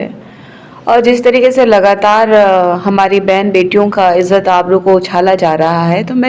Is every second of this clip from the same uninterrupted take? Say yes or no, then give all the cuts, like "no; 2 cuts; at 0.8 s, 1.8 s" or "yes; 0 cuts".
yes; 0 cuts